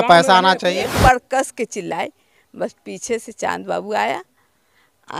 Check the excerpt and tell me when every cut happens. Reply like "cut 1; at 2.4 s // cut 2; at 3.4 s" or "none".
cut 1; at 0.9 s